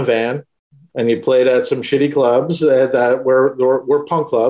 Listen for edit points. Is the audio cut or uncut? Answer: uncut